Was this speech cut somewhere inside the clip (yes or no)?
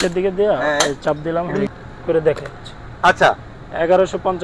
yes